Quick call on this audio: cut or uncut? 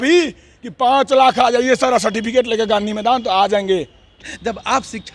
cut